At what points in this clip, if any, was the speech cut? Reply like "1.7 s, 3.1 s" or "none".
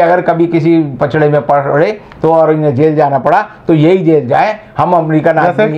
none